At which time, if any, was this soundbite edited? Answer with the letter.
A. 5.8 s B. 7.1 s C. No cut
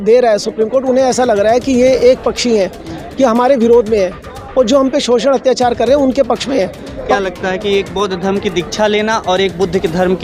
B